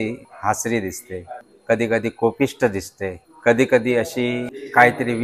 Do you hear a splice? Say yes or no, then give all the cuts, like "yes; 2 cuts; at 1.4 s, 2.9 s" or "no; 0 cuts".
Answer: no; 0 cuts